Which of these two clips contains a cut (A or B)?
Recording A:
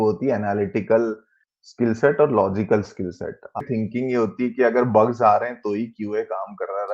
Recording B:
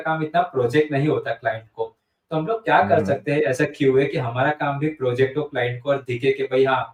A